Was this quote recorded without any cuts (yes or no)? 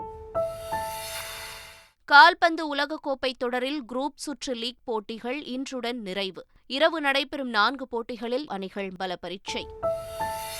no